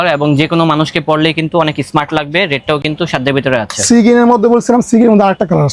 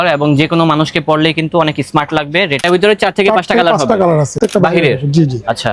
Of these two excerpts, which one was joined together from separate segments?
second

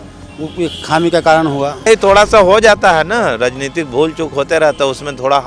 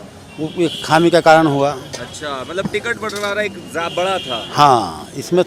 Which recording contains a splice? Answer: first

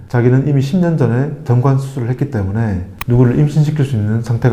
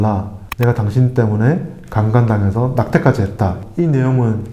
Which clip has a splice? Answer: second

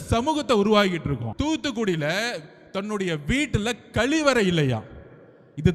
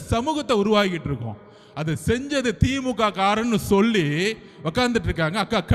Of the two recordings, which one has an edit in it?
first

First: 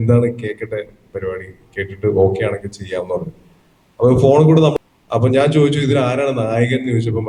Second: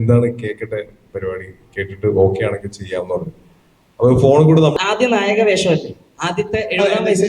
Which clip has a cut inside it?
second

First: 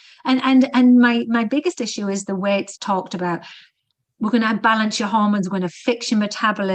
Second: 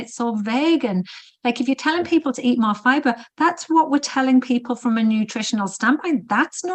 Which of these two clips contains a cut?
first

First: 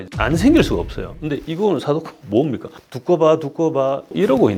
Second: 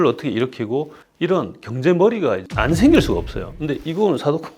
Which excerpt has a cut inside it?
second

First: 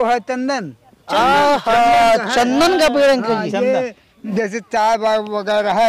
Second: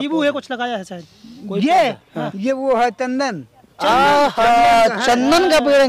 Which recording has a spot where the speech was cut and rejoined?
first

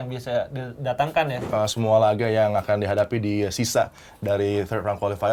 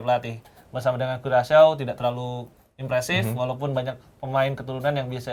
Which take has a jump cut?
first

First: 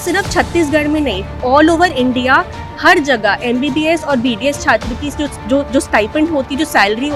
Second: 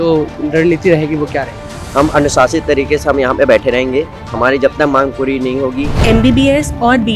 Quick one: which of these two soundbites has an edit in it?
second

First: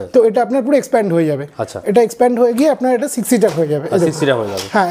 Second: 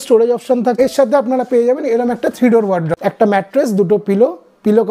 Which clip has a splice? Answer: second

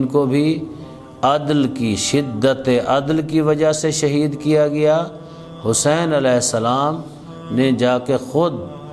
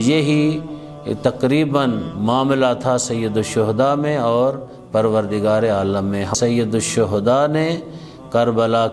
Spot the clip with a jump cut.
second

